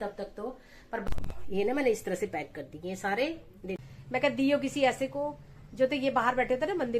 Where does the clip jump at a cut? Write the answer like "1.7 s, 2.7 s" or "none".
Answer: 1.0 s, 3.7 s